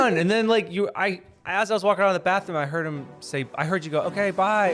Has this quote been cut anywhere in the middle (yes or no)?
no